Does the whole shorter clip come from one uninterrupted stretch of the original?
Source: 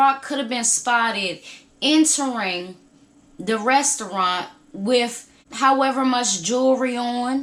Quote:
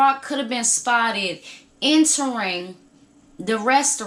yes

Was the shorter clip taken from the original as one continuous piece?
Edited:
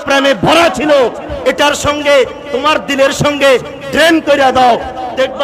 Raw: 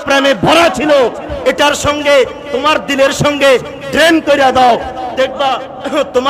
yes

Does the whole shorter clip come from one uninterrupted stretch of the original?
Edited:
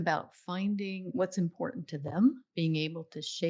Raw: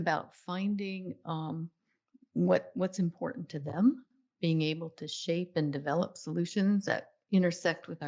no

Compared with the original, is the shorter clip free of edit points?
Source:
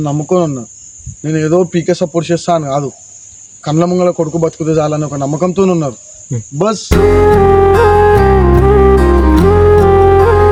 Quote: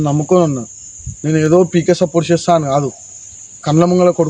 yes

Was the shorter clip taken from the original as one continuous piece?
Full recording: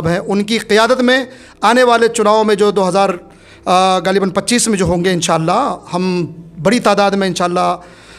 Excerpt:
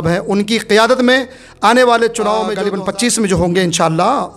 no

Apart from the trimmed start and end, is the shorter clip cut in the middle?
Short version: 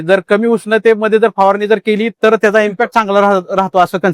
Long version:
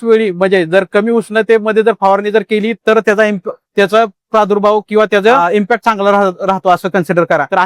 yes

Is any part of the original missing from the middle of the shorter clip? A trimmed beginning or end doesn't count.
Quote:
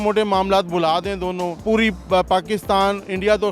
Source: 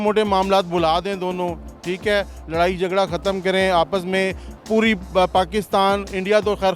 yes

